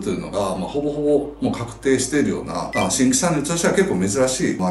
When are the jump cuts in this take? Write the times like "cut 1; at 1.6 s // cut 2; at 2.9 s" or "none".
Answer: none